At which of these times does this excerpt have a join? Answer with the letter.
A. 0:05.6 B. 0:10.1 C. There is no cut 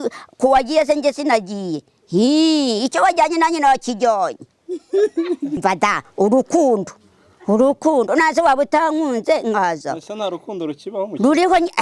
A